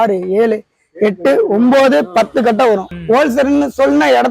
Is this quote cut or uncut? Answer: cut